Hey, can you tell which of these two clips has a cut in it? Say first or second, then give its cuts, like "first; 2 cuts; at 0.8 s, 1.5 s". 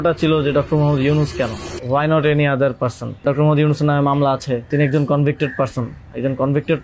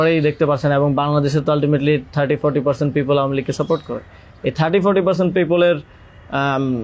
first; 3 cuts; at 1.7 s, 3.2 s, 4.7 s